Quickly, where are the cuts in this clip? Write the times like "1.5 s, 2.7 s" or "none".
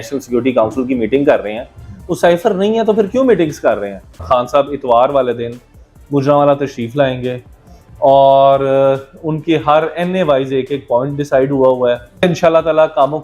4.1 s, 12.2 s